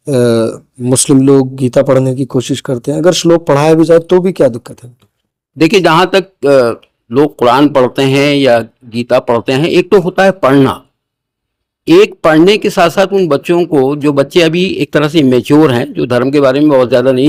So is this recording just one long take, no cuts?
yes; 0 cuts

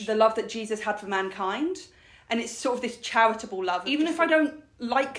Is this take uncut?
no; 1 cut; at 3.8 s

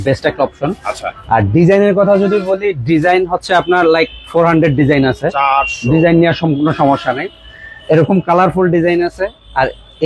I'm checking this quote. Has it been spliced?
no; 0 cuts

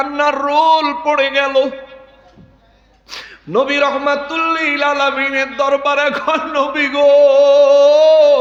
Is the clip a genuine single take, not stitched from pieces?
yes; 0 cuts

